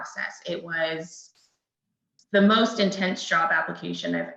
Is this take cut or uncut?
uncut